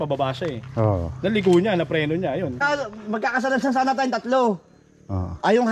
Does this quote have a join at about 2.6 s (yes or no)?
yes